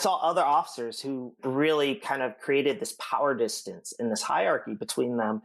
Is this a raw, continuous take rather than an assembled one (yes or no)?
no